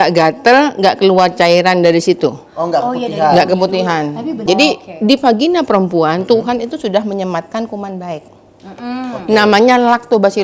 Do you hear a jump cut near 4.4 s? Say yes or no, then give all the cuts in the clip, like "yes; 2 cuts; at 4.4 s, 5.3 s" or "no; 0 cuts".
yes; 1 cut; at 4.4 s